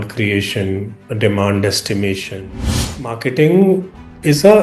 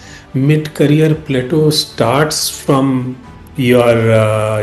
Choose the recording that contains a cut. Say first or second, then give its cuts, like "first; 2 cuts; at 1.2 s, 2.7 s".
first; 1 cut; at 2.9 s